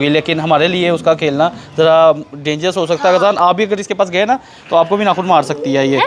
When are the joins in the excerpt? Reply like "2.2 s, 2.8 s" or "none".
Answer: none